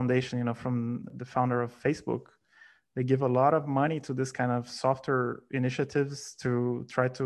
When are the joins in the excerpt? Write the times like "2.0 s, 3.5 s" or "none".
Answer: 1.2 s